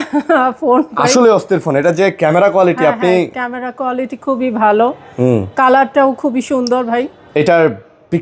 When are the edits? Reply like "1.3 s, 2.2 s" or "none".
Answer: none